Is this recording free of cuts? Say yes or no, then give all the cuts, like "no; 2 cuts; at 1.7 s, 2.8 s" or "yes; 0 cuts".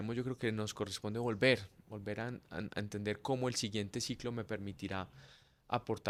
yes; 0 cuts